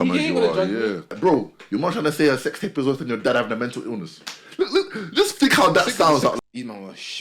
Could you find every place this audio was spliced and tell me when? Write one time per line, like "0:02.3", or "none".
0:01.1
0:06.4

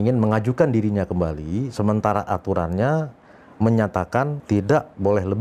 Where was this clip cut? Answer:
0:04.4

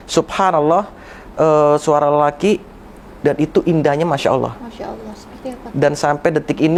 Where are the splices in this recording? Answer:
none

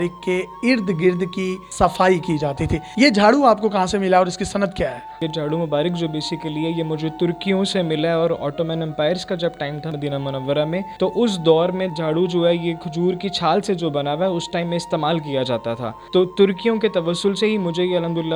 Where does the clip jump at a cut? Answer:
none

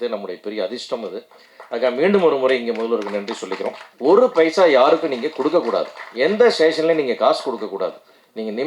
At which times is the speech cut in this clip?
0:03.9

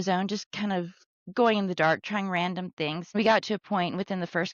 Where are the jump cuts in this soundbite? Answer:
0:03.2

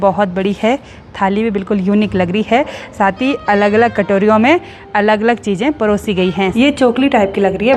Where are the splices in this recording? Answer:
0:06.5

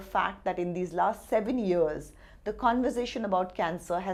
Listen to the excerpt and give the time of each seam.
none

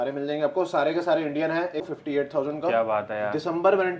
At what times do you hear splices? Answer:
0:01.8

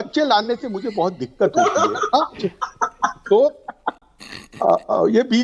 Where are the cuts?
0:04.0

